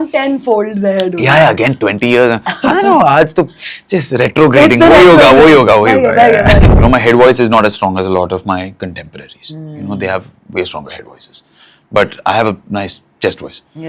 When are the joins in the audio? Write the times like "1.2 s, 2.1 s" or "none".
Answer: 6.7 s